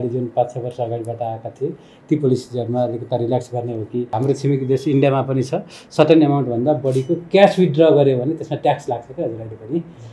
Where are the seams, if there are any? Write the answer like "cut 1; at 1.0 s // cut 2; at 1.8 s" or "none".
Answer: cut 1; at 4.2 s